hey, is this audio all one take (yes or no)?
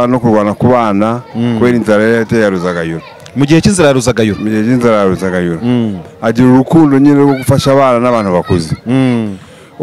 yes